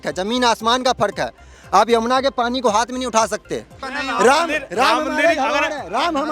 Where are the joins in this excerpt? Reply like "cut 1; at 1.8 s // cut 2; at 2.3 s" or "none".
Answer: cut 1; at 3.8 s